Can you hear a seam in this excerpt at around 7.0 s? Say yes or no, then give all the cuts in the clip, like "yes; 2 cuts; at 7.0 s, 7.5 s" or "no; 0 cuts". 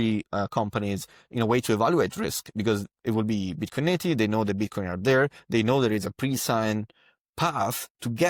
no; 0 cuts